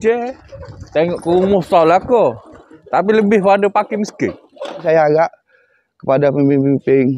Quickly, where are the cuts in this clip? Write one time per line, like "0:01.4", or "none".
0:04.8